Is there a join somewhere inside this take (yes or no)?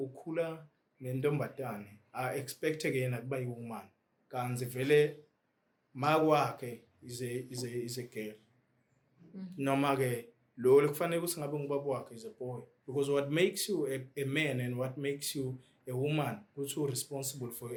no